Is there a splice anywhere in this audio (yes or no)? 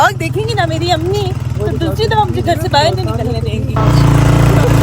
yes